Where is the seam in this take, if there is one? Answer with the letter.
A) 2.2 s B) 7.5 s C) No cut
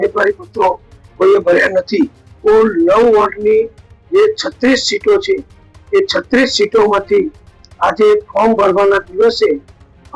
A